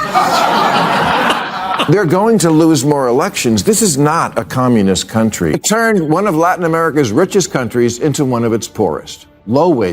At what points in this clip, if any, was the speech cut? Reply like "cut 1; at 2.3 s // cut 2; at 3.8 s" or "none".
cut 1; at 5.4 s